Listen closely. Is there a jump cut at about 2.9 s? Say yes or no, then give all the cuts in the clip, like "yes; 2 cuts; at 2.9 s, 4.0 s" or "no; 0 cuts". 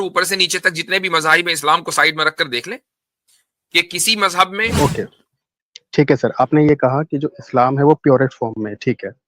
no; 1 cut; at 4.7 s